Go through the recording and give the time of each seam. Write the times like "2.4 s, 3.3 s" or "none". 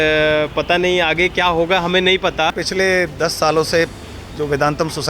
2.6 s

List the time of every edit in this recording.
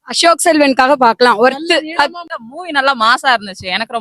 2.3 s

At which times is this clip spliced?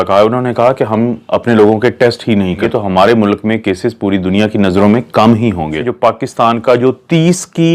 2.6 s, 5.8 s

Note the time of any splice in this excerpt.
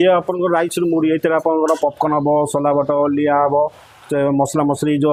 none

